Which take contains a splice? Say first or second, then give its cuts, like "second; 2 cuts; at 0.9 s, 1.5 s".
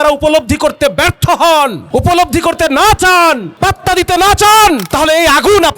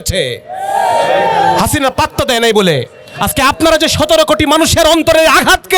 first; 3 cuts; at 1.8 s, 3.5 s, 4.9 s